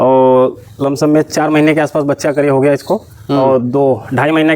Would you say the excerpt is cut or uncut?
uncut